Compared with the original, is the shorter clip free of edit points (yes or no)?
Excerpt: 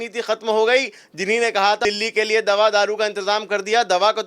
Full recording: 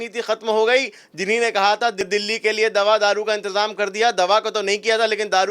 no